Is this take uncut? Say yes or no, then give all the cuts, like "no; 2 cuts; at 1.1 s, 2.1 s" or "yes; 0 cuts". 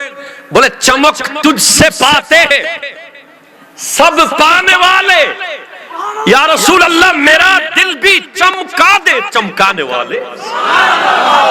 yes; 0 cuts